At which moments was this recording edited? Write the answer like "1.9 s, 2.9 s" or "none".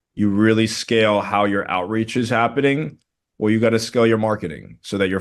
none

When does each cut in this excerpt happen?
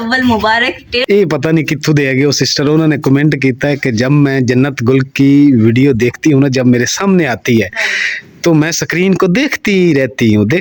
1.0 s

